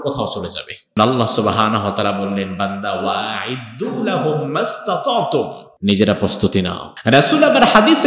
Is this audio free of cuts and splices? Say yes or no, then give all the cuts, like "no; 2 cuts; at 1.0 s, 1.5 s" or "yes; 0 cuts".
no; 3 cuts; at 1.0 s, 5.6 s, 6.8 s